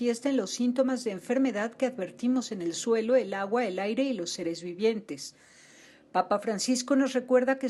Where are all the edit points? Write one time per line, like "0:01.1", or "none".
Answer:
0:06.5